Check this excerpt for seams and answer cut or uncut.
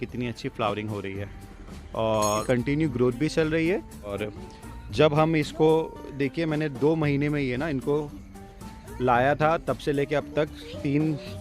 cut